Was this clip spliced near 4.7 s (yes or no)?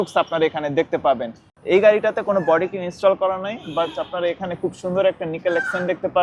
no